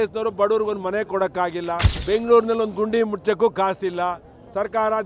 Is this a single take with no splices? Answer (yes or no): no